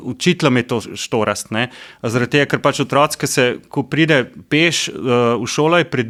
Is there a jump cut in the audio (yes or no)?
no